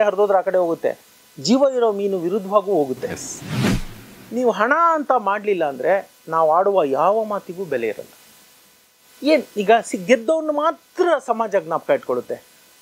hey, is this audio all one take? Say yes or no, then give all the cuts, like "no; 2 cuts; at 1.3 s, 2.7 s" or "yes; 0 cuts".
no; 1 cut; at 3.7 s